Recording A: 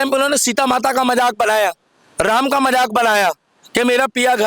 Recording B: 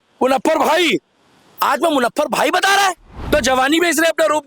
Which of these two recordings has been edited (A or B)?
B